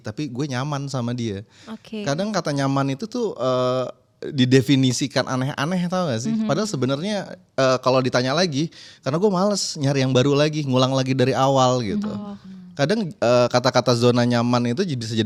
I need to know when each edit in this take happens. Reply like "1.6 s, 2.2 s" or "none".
none